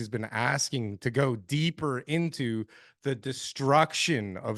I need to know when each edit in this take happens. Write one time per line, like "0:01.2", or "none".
none